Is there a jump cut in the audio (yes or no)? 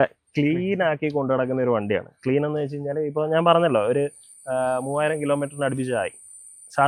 no